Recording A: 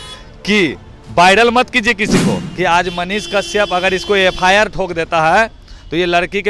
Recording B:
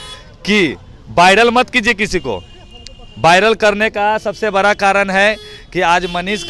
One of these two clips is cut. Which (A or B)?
A